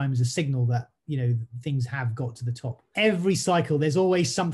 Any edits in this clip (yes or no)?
yes